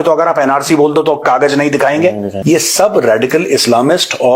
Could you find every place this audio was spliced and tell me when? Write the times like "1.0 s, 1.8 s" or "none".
2.8 s